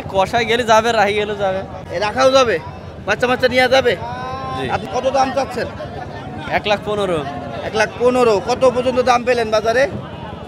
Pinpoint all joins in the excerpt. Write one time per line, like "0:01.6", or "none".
none